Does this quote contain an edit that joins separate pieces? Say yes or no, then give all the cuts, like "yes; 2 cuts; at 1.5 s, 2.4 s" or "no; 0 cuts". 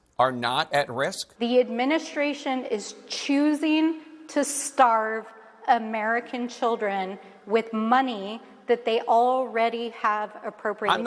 yes; 1 cut; at 1.2 s